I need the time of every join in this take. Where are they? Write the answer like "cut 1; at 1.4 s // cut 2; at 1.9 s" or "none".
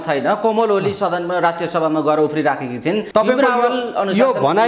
cut 1; at 3.0 s